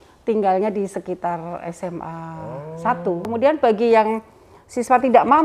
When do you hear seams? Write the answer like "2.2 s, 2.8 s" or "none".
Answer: 3.3 s